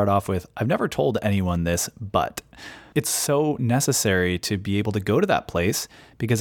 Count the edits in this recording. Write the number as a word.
one